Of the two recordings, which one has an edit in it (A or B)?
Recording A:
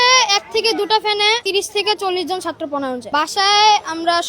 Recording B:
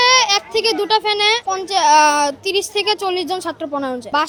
A